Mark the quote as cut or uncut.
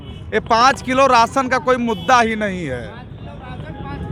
uncut